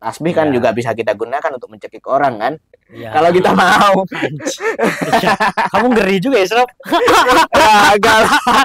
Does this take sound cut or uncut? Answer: uncut